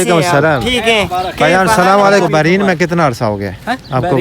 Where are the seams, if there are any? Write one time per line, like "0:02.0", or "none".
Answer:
0:02.2